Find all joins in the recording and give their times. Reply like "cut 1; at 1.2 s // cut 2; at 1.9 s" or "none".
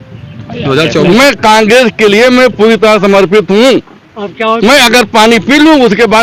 none